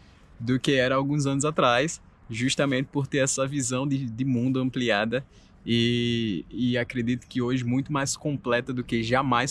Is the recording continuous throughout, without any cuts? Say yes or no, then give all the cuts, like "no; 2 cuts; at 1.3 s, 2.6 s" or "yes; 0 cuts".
yes; 0 cuts